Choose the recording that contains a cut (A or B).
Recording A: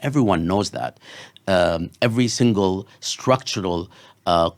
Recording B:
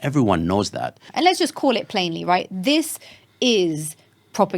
B